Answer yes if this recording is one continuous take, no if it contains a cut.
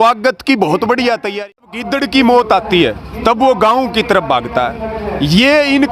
no